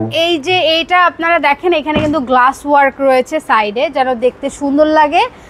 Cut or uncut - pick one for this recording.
uncut